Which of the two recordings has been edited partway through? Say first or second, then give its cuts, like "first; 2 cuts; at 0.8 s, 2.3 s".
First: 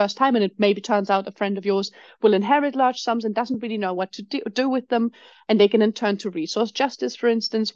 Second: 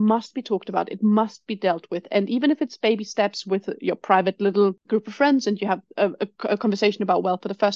second; 1 cut; at 4.8 s